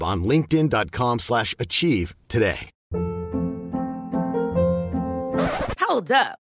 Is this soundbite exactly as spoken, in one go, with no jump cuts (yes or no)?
no